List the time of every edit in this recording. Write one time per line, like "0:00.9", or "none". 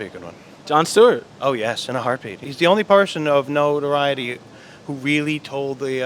0:02.4